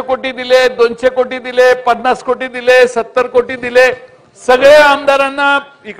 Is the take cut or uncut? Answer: uncut